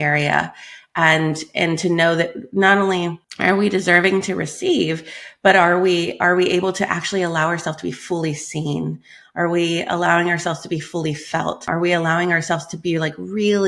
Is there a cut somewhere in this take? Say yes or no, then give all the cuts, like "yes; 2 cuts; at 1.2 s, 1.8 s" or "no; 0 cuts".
yes; 2 cuts; at 3.2 s, 11.7 s